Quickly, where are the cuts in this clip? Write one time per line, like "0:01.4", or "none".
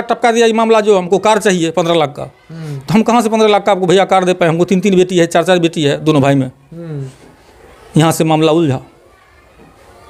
none